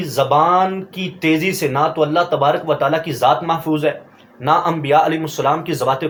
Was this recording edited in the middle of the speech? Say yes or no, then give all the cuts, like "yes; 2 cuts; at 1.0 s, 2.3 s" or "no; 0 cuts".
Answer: no; 0 cuts